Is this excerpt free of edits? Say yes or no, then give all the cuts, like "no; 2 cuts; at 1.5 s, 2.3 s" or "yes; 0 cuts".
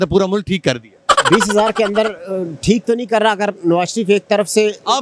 yes; 0 cuts